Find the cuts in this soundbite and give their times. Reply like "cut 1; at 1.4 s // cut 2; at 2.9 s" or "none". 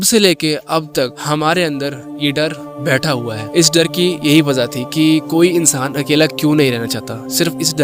cut 1; at 1.2 s // cut 2; at 3.4 s